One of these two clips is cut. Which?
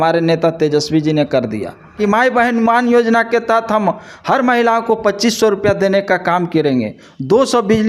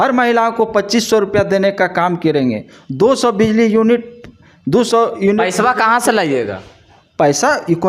first; 1 cut; at 2.0 s

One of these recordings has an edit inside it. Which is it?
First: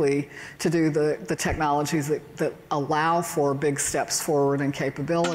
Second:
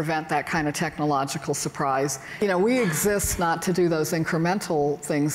second; 1 cut; at 2.4 s

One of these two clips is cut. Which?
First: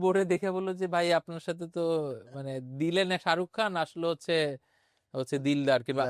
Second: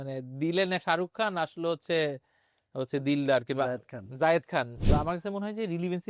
second; 1 cut; at 4.8 s

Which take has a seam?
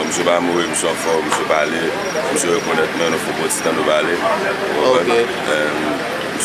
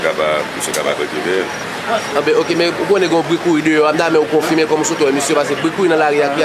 first; 1 cut; at 2.8 s

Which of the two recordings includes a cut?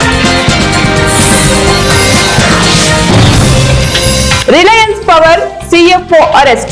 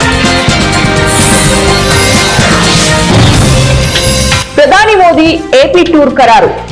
second; 1 cut; at 1.1 s

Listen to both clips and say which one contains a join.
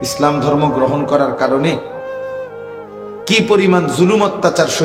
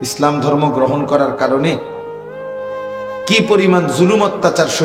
second; 2 cuts; at 1.9 s, 3.3 s

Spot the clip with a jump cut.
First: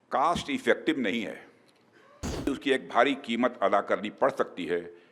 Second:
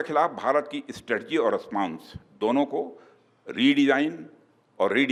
first; 1 cut; at 2.5 s

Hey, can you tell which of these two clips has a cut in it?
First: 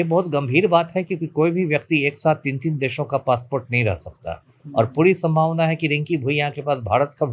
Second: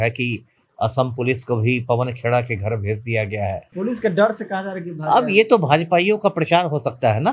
second; 1 cut; at 3.6 s

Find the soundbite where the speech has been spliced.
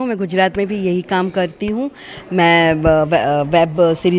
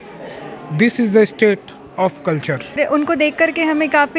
second; 1 cut; at 2.8 s

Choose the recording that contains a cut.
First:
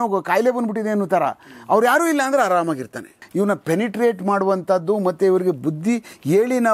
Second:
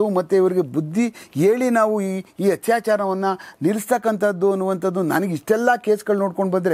first; 1 cut; at 3.2 s

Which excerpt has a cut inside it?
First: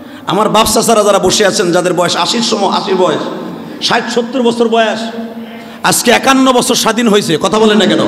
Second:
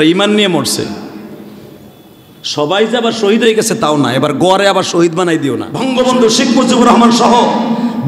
second; 1 cut; at 5.7 s

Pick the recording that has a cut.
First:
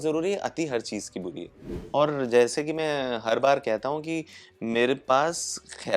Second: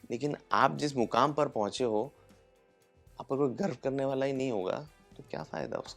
first; 1 cut; at 1.7 s

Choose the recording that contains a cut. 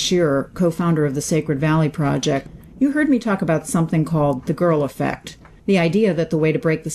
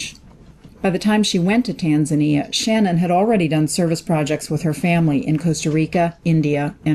first; 1 cut; at 1.3 s

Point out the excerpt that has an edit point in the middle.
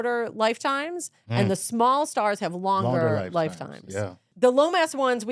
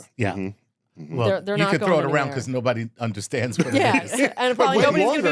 first; 1 cut; at 4.3 s

